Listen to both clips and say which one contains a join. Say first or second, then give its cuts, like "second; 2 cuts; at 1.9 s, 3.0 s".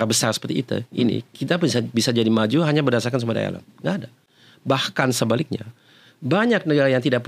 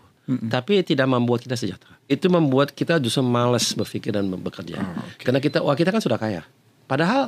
second; 1 cut; at 2.1 s